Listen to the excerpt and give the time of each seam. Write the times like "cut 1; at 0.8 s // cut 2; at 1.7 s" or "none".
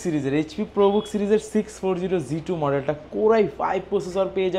none